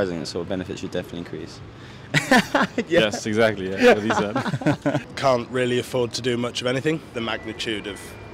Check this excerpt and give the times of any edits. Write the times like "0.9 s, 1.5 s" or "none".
5.1 s, 7.1 s